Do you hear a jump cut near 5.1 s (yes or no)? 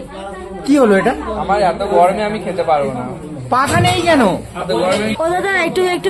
yes